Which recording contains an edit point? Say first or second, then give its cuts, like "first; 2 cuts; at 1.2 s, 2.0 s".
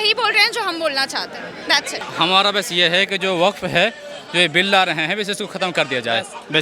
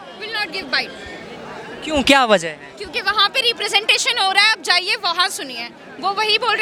first; 1 cut; at 2.0 s